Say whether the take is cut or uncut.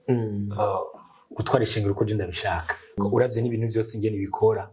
cut